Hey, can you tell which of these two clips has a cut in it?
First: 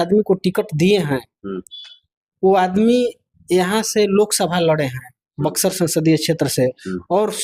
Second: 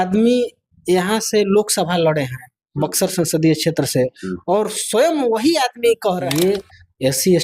second; 1 cut; at 6.3 s

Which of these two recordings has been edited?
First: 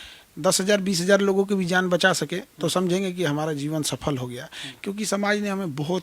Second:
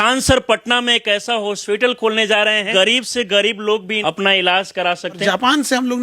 second; 3 cuts; at 2.7 s, 3.9 s, 5.2 s

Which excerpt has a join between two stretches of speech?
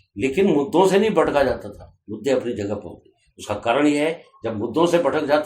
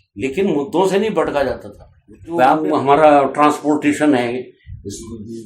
second; 1 cut; at 2.4 s

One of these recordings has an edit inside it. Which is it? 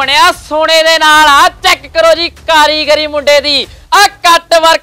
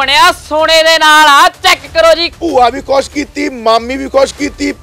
second; 1 cut; at 2.3 s

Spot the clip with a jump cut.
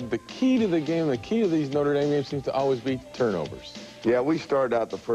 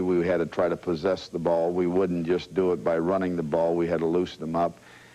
second; 1 cut; at 2.5 s

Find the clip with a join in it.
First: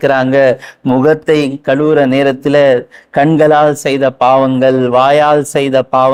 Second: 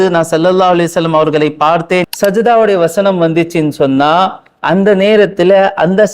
second; 1 cut; at 2.1 s

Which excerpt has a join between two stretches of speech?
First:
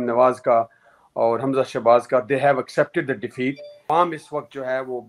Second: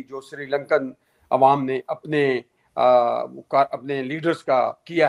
first; 1 cut; at 3.7 s

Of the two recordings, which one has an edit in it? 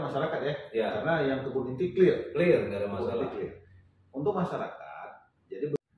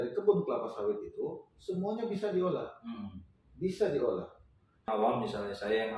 second; 1 cut; at 4.8 s

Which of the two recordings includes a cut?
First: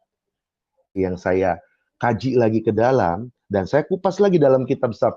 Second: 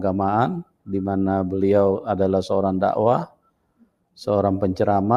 first; 1 cut; at 1.0 s

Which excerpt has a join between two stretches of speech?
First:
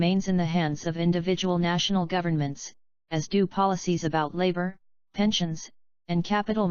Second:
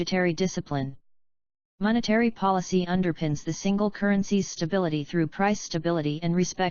second; 1 cut; at 3.2 s

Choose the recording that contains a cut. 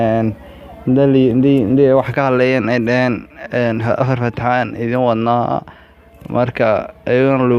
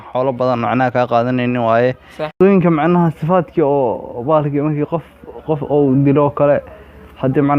second; 1 cut; at 2.4 s

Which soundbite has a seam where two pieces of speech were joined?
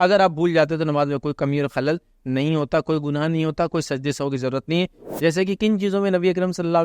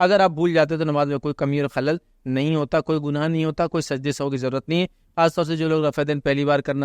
first; 1 cut; at 5.0 s

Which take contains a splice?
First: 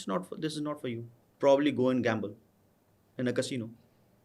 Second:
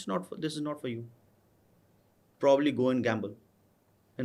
first; 1 cut; at 1.2 s

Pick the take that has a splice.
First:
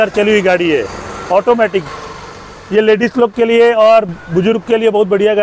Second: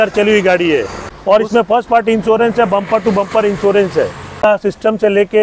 second; 2 cuts; at 1.4 s, 4.4 s

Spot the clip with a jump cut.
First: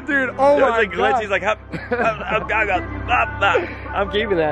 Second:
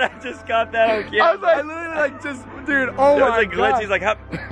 second; 1 cut; at 1.7 s

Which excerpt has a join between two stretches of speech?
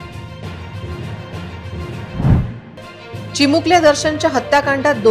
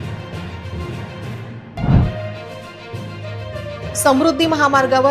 second; 1 cut; at 1.0 s

